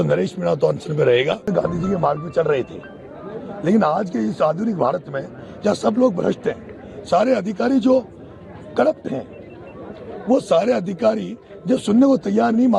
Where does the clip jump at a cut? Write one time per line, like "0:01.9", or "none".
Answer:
0:01.5